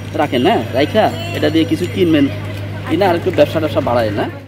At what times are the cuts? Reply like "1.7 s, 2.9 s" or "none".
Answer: none